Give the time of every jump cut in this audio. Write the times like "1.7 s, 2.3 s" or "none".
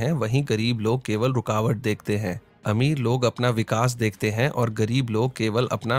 none